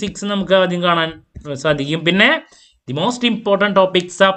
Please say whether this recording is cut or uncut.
uncut